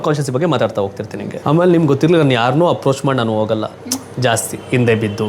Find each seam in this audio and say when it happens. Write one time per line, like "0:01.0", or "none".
0:01.1